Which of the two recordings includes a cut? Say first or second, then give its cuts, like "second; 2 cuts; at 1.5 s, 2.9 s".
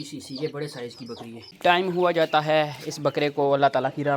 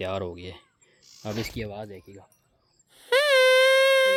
first; 1 cut; at 1.4 s